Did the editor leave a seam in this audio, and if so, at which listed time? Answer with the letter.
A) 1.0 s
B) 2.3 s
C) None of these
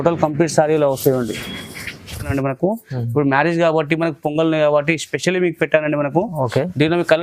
B